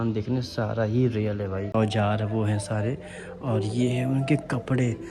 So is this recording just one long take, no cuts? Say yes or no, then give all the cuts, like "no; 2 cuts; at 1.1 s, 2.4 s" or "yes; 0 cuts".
no; 1 cut; at 1.7 s